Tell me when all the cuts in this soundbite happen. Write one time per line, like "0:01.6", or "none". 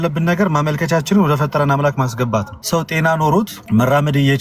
0:02.6
0:03.6